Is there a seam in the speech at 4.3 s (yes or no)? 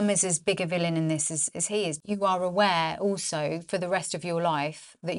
no